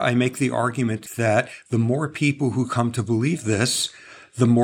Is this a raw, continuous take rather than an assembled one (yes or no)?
no